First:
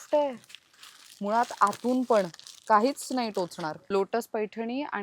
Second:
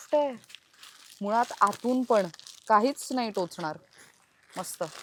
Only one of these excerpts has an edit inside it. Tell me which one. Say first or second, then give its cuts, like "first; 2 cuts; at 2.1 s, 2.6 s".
first; 1 cut; at 3.8 s